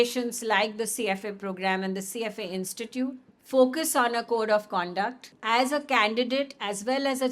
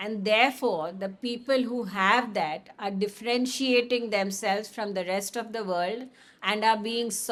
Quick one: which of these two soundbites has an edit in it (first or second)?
first